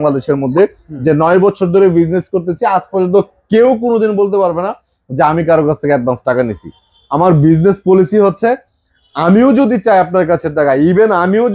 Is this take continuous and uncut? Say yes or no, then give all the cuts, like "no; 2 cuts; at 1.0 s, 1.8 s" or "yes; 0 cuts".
yes; 0 cuts